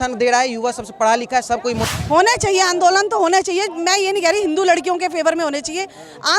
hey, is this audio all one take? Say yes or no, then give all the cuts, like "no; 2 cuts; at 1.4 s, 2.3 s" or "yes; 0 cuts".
no; 1 cut; at 1.8 s